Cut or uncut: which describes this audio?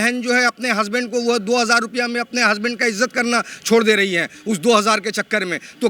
uncut